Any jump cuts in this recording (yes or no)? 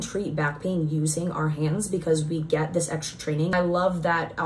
yes